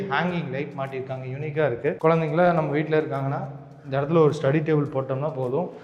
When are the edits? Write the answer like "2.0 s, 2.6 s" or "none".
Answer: 2.0 s